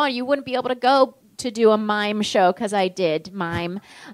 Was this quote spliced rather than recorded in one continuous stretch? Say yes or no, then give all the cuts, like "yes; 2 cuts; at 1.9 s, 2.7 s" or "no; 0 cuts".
yes; 1 cut; at 1.3 s